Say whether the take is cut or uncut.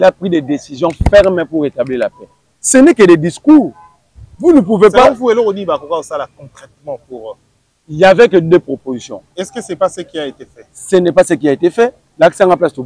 cut